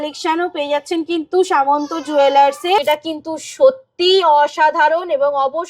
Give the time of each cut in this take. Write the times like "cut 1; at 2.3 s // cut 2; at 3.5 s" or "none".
cut 1; at 2.8 s